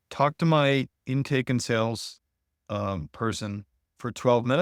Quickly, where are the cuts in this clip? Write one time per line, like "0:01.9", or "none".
none